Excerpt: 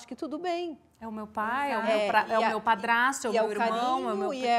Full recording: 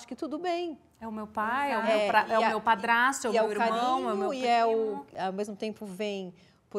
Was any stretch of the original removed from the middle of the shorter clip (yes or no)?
no